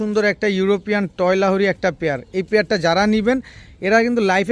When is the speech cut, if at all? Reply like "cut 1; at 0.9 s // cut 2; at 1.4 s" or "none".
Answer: none